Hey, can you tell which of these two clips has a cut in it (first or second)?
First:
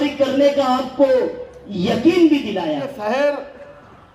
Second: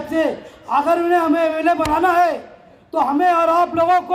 first